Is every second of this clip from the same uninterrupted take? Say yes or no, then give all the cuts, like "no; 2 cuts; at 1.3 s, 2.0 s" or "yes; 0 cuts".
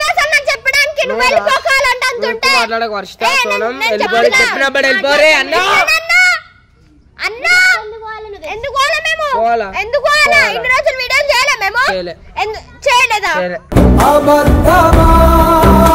yes; 0 cuts